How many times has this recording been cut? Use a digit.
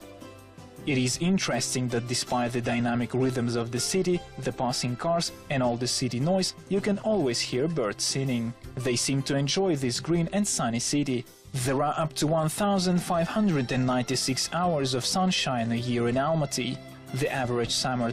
1